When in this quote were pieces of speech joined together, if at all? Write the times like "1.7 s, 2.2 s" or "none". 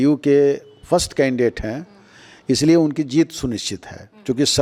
none